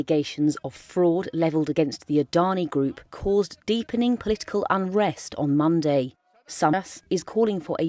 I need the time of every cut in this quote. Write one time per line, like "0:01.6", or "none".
0:06.7